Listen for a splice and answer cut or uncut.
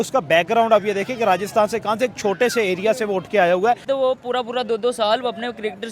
cut